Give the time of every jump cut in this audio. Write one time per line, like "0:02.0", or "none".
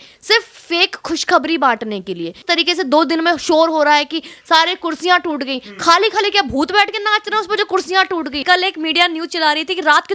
0:02.4
0:08.4